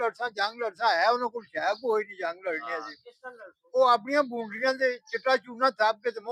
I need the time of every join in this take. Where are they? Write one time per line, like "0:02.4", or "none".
none